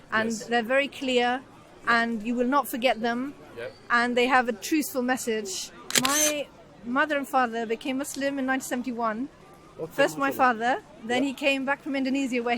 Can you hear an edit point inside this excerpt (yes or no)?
yes